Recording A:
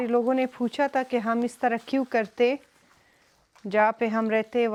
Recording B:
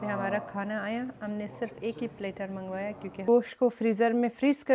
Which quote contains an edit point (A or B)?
B